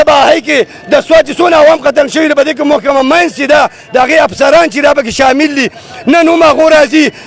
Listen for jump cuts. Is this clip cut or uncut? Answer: uncut